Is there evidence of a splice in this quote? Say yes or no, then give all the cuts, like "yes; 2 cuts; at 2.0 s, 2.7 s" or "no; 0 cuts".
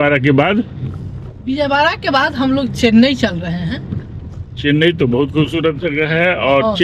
no; 0 cuts